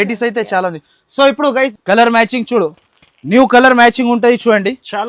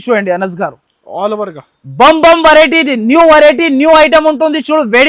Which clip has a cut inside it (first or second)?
first